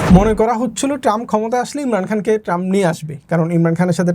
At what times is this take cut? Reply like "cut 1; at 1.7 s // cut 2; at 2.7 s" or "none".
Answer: none